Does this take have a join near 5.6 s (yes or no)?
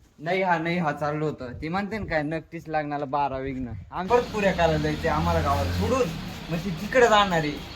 no